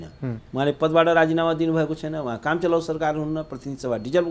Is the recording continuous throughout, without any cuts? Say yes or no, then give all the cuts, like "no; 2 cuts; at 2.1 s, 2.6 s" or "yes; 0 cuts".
yes; 0 cuts